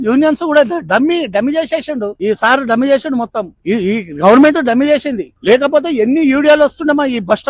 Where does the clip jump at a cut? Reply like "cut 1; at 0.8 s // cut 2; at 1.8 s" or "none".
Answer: none